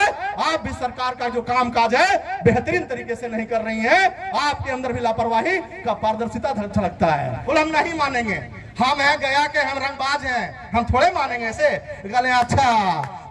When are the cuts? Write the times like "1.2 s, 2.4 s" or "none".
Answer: 7.3 s